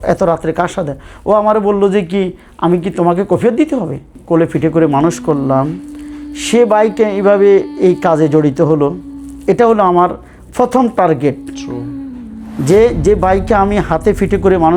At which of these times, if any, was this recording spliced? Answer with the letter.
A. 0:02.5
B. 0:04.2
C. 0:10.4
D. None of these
B